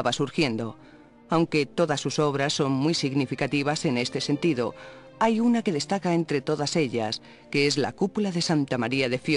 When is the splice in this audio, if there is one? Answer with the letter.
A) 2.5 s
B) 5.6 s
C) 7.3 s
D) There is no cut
B